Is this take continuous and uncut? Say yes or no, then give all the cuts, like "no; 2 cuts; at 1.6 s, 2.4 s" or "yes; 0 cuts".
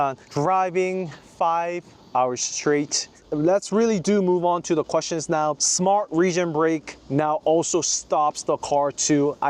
yes; 0 cuts